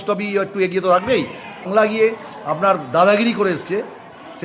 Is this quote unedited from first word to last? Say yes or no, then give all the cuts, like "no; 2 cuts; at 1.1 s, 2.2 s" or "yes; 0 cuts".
no; 1 cut; at 1.7 s